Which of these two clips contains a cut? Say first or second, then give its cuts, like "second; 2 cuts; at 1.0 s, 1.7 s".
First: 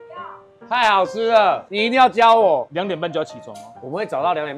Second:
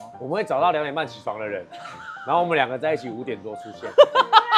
first; 2 cuts; at 1.7 s, 2.7 s